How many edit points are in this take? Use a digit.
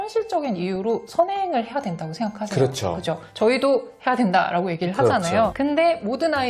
1